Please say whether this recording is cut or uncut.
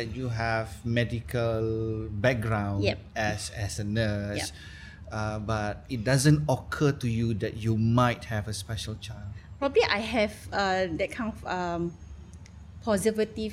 uncut